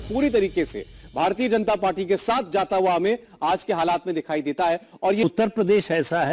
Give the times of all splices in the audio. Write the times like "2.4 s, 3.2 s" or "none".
2.5 s, 5.2 s